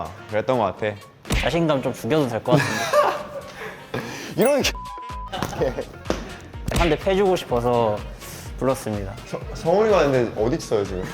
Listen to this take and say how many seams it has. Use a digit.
2